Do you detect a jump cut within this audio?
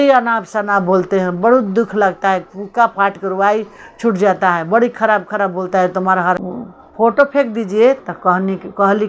yes; 1 cut; at 6.4 s

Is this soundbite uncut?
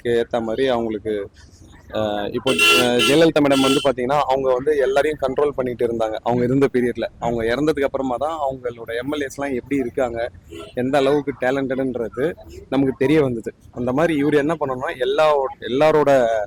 yes; 0 cuts

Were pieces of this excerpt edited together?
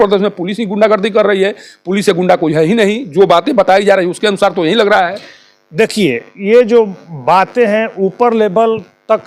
no; 0 cuts

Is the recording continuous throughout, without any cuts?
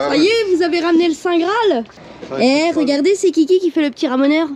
no; 1 cut; at 2.0 s

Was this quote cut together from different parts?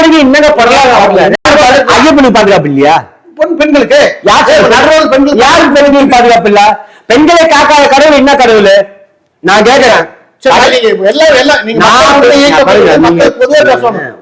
yes; 2 cuts; at 1.4 s, 10.6 s

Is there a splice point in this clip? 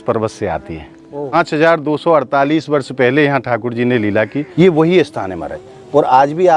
yes; 2 cuts; at 1.3 s, 4.4 s

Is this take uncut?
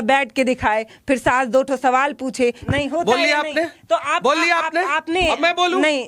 no; 1 cut; at 2.6 s

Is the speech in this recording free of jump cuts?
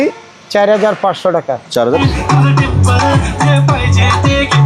no; 1 cut; at 2.0 s

